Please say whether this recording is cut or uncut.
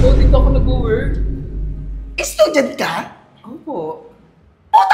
uncut